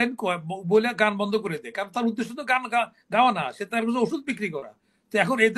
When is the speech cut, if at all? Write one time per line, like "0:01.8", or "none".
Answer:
none